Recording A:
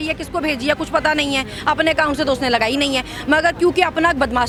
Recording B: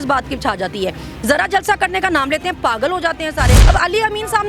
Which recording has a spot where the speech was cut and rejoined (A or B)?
B